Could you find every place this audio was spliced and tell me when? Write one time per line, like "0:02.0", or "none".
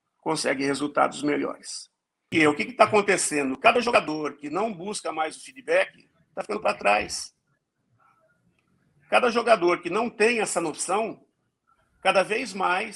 0:02.3